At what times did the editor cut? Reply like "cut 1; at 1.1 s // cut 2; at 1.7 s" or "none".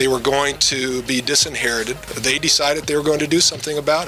cut 1; at 2.1 s